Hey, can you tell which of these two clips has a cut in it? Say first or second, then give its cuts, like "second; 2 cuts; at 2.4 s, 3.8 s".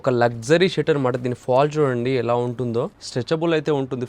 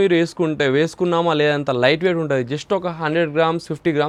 first; 1 cut; at 3.0 s